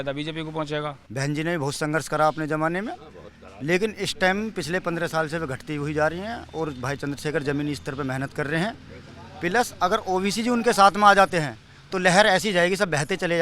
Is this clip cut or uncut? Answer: cut